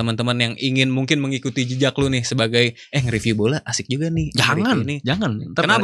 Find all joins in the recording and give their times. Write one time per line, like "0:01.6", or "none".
none